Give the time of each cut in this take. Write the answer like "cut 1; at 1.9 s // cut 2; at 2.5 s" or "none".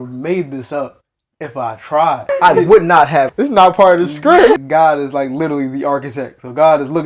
cut 1; at 2.2 s // cut 2; at 3.3 s // cut 3; at 4.6 s